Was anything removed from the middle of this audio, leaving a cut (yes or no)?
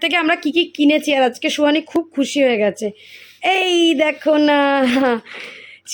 no